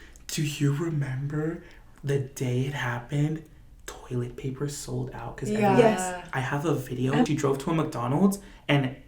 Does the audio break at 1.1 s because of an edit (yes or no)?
no